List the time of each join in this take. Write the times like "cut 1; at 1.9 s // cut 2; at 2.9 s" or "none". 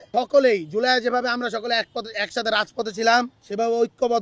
none